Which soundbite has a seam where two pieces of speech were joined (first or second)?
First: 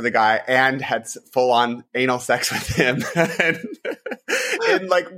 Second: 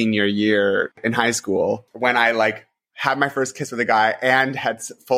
second